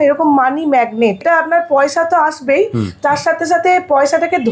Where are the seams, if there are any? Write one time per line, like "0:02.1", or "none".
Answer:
0:01.2